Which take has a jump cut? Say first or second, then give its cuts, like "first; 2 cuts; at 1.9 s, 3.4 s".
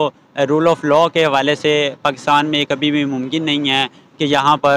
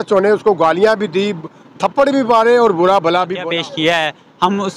second; 1 cut; at 3.4 s